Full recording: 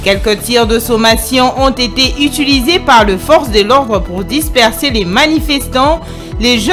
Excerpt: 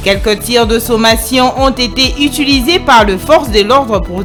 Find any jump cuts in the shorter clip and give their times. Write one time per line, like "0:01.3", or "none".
none